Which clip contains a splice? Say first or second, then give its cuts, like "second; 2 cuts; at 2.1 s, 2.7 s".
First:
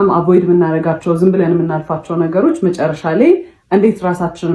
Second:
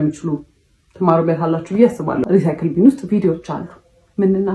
second; 1 cut; at 2.2 s